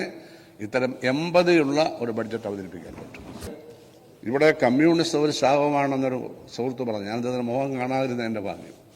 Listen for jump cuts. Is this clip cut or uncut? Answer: cut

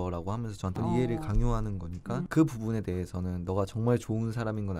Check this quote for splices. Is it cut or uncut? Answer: cut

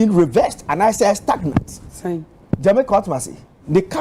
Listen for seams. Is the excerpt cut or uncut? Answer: cut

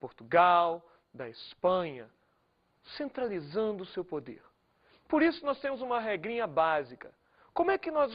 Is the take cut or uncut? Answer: cut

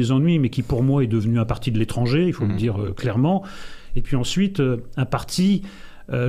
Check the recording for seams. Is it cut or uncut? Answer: cut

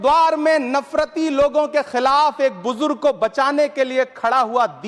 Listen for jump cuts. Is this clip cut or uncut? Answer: uncut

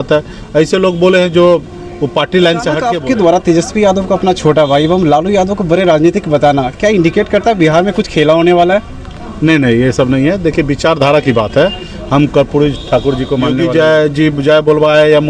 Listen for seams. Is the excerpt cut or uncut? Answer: cut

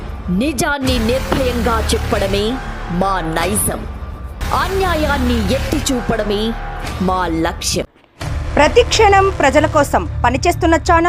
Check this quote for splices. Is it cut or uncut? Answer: uncut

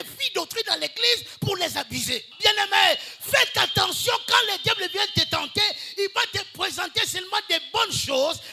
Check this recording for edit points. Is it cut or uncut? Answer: cut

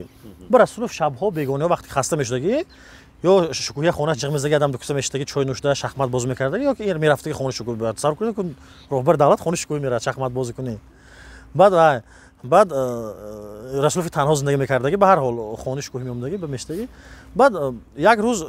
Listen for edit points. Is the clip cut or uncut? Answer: uncut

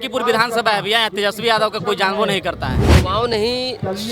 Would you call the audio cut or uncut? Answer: cut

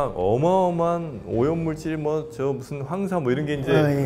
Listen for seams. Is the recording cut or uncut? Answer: uncut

